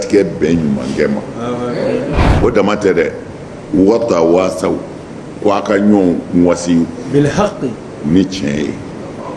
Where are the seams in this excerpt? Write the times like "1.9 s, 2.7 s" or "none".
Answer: 2.3 s